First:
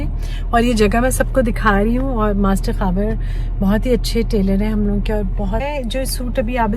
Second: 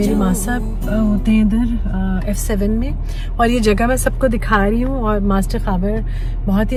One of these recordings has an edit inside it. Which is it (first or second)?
first